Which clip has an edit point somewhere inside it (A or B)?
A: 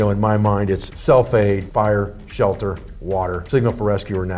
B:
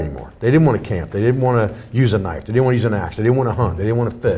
A